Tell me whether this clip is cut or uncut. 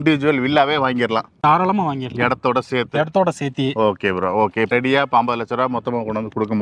uncut